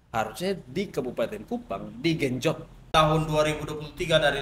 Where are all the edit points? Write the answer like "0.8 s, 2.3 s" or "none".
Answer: 2.8 s